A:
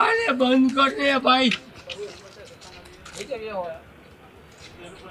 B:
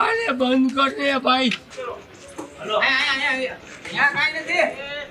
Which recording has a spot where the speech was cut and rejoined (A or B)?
B